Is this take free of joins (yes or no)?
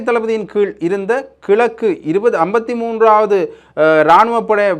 yes